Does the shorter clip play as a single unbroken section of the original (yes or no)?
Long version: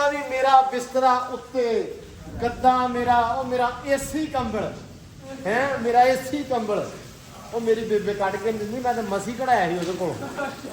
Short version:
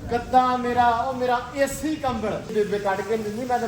no